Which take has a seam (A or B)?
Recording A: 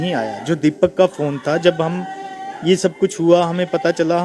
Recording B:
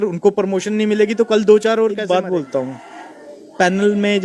B